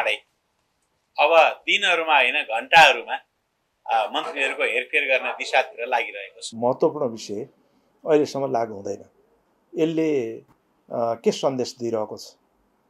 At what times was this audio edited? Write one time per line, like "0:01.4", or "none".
0:06.5